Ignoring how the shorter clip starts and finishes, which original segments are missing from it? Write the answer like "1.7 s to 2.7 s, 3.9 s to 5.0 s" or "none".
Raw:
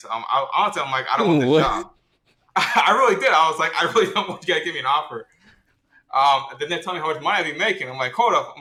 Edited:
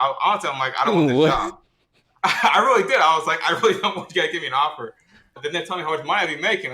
5.7 s to 6.5 s